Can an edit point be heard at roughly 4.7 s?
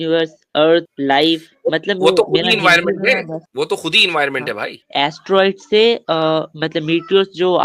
yes; 3 cuts; at 0.9 s, 3.4 s, 4.7 s

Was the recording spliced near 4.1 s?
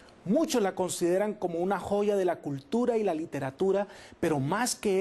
yes; 1 cut; at 4.1 s

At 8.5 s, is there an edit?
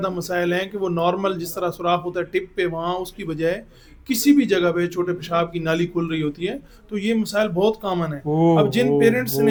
no; 0 cuts

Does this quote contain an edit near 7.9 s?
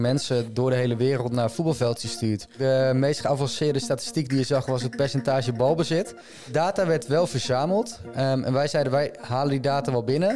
no; 2 cuts; at 2.5 s, 6.4 s

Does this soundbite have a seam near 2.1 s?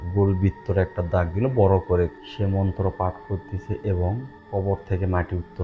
yes; 2 cuts; at 2.1 s, 4.3 s

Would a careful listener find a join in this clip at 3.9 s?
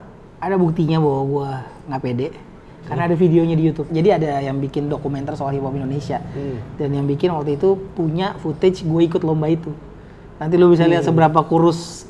yes; 1 cut; at 3.9 s

